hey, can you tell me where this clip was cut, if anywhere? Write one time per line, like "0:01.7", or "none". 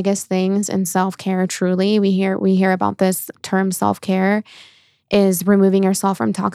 none